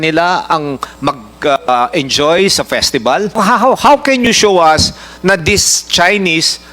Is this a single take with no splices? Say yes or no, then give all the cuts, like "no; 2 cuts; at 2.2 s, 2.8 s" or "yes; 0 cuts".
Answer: no; 1 cut; at 3.4 s